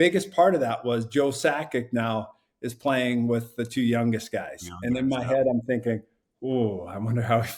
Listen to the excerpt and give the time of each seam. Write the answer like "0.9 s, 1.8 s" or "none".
none

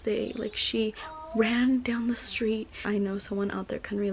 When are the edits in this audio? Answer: 2.8 s

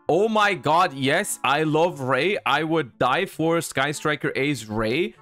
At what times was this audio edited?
1.0 s

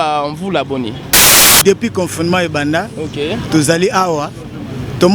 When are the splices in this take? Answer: 1.3 s

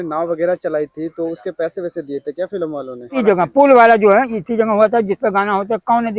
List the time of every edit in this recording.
3.2 s

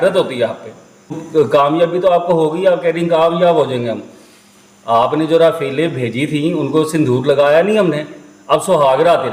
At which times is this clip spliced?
1.2 s

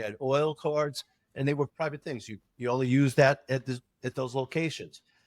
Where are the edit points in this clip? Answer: 1.7 s

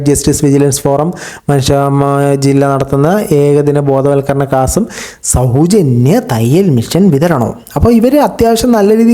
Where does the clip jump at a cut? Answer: none

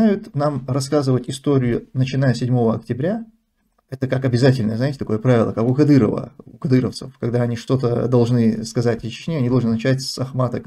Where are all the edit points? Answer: none

